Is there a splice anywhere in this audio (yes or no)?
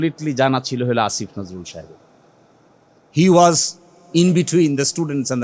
no